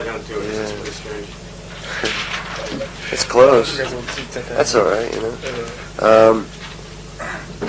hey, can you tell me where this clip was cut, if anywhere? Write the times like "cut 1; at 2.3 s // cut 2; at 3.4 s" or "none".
none